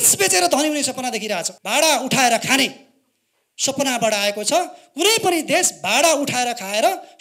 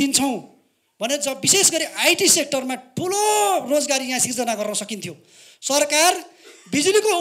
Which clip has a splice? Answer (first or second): first